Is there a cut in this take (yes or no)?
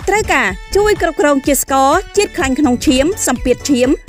no